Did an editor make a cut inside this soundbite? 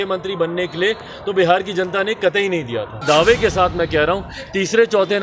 yes; 1 cut; at 3.0 s

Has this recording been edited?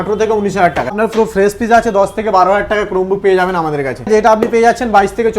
yes; 2 cuts; at 0.9 s, 4.1 s

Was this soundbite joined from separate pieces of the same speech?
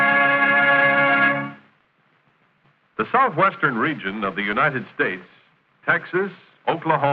yes; 1 cut; at 1.6 s

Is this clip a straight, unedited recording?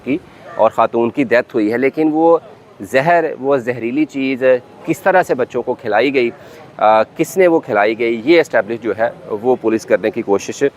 yes; 0 cuts

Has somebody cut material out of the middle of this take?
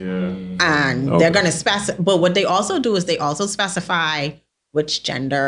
no; 0 cuts

